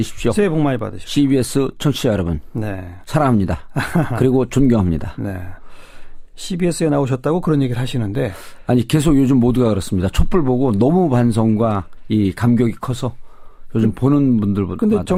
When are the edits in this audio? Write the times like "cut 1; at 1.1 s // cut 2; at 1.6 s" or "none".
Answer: none